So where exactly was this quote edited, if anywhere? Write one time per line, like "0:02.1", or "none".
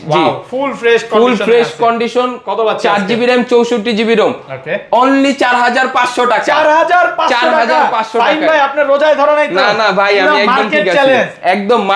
none